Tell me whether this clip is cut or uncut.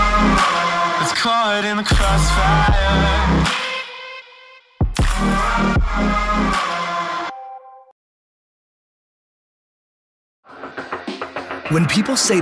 cut